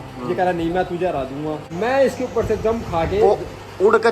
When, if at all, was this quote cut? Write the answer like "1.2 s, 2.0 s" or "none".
1.7 s